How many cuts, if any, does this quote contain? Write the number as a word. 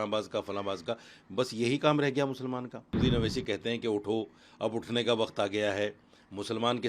one